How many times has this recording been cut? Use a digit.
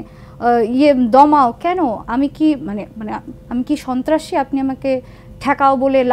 0